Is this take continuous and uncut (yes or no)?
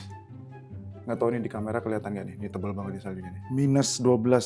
no